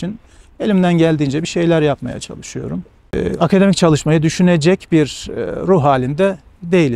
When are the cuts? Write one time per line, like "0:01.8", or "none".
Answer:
0:03.1

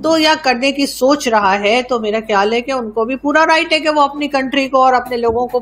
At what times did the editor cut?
none

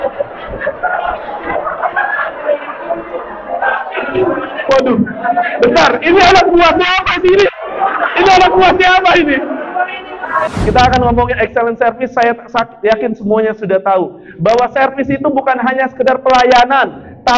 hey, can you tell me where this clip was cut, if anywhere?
0:10.5

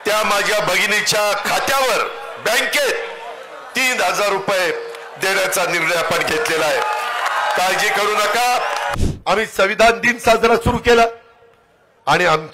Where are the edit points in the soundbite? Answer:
0:09.0

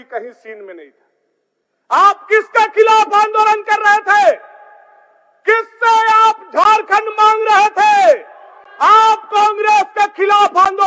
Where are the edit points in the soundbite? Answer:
none

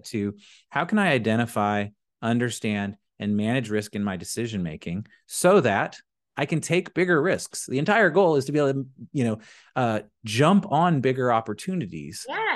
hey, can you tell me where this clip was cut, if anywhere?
none

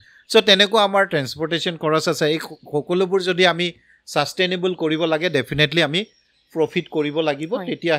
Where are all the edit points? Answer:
none

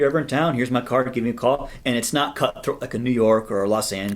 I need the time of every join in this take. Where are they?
0:01.7

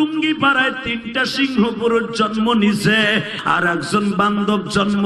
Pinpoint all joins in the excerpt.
0:03.4

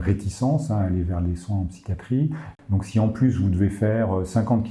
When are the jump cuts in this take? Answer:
0:02.5

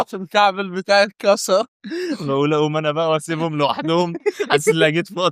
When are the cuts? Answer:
0:01.8

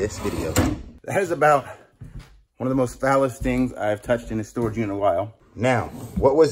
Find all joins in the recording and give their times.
0:00.9
0:05.4

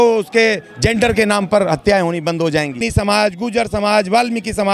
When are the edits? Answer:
0:02.8

